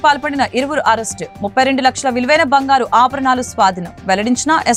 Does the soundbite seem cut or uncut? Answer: uncut